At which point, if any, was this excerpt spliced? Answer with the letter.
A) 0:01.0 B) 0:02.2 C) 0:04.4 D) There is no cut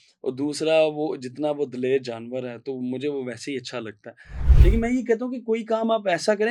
C